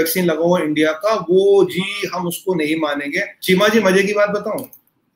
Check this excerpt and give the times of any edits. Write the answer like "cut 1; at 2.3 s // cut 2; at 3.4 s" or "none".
cut 1; at 3.3 s